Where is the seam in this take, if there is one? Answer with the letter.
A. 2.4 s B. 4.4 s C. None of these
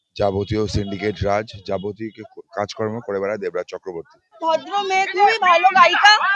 B